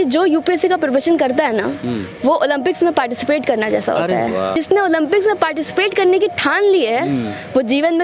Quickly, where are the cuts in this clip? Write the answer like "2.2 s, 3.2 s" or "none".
4.6 s